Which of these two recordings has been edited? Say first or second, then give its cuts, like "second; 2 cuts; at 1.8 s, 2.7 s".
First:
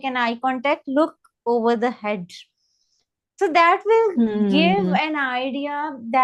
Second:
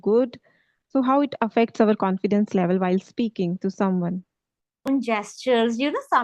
second; 1 cut; at 4.9 s